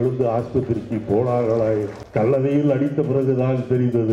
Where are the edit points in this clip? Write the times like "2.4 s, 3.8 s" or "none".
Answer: 2.0 s